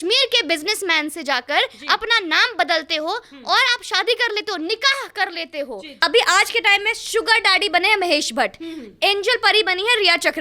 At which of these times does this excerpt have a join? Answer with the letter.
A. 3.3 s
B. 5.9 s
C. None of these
B